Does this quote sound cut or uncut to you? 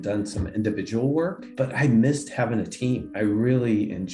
cut